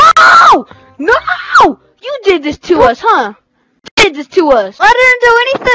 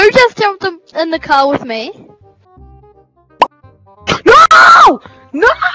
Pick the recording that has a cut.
first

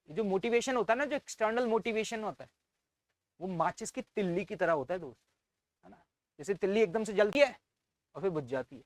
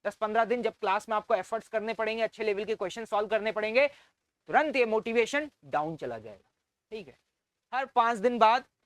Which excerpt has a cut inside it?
second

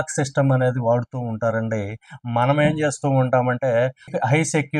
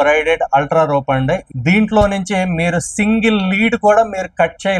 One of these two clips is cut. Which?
second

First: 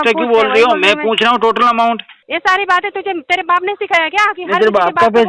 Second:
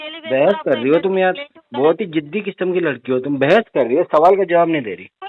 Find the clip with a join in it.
first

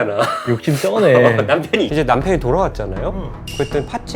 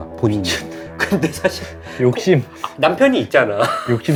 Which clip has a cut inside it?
first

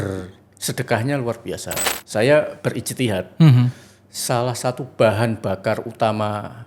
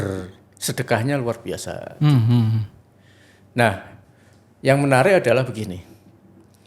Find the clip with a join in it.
first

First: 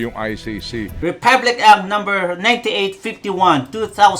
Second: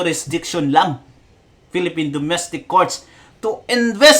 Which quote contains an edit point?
first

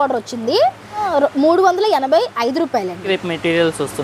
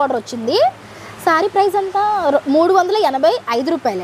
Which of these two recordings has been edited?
first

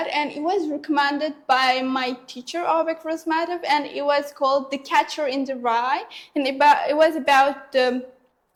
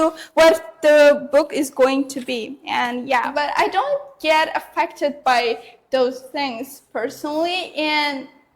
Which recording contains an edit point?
second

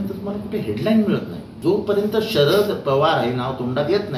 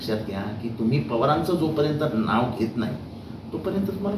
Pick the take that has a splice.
first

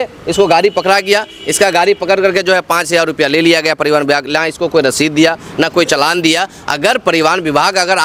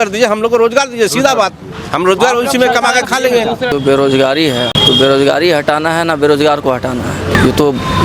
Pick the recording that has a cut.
second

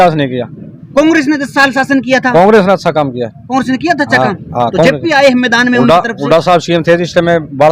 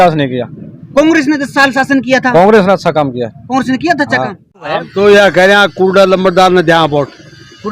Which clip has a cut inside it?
second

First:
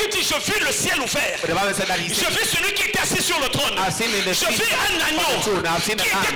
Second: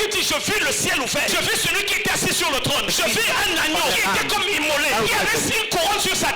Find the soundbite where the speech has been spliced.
second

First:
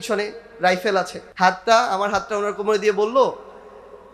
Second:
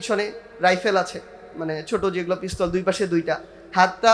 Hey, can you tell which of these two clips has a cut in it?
first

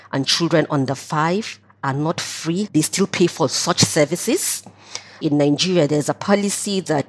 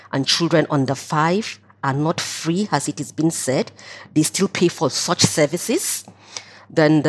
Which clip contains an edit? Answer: first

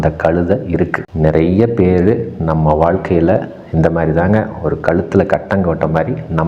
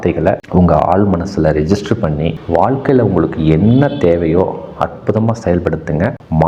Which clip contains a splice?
first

